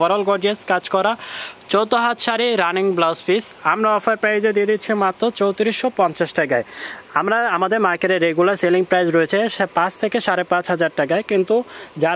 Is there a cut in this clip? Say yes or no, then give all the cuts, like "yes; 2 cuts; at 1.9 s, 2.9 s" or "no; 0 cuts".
no; 0 cuts